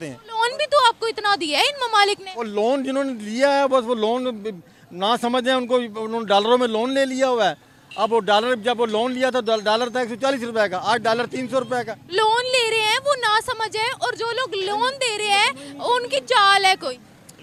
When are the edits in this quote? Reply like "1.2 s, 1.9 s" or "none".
none